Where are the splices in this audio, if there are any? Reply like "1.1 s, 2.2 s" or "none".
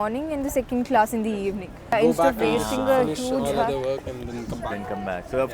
1.9 s